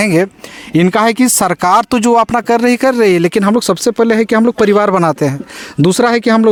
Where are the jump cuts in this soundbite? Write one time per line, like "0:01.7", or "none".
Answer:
none